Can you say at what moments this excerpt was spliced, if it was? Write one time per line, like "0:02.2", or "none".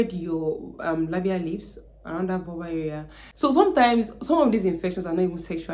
0:03.2